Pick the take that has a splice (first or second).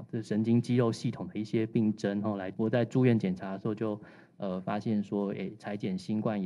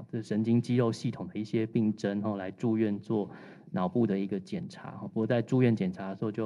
first